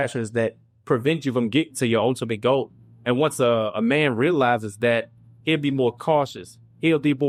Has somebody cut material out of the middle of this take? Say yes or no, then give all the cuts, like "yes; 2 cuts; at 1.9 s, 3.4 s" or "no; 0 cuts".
no; 0 cuts